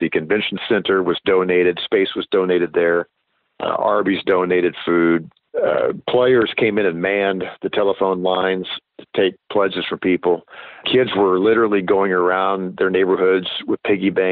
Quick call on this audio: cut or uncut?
cut